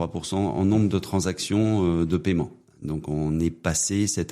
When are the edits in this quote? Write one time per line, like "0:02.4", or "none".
0:02.6